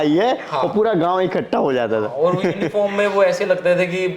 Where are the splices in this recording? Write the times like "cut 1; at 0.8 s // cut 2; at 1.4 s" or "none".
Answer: none